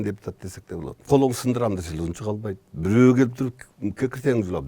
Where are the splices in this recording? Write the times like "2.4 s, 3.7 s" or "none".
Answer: 1.0 s